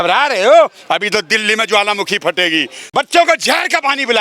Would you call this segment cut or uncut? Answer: cut